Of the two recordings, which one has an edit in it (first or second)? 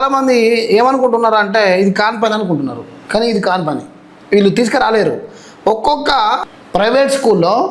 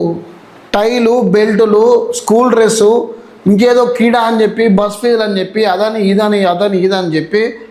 first